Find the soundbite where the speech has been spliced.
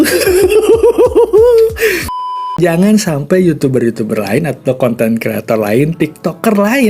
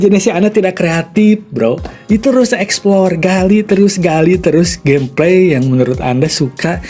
first; 1 cut; at 2.4 s

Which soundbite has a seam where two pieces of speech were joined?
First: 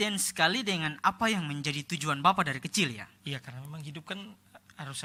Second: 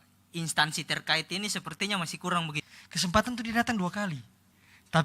second; 1 cut; at 2.7 s

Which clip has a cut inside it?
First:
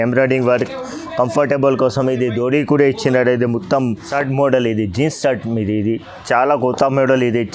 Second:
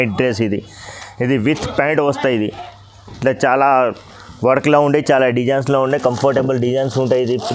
first; 1 cut; at 4.0 s

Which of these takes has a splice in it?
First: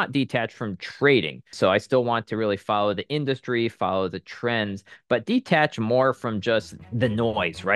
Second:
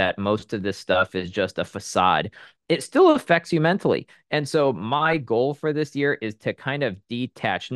first; 2 cuts; at 1.5 s, 6.8 s

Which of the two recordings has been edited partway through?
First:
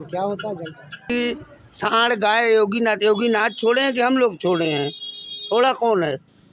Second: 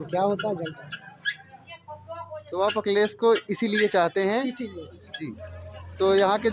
first; 1 cut; at 1.1 s

